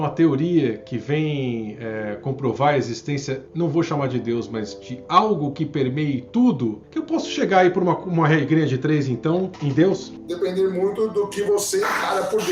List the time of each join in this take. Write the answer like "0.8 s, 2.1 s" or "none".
10.2 s

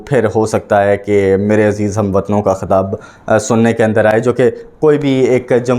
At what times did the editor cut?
none

